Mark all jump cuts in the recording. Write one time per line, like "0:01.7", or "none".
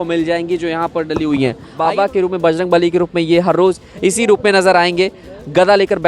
0:01.7